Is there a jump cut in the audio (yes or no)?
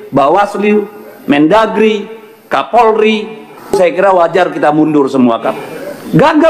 yes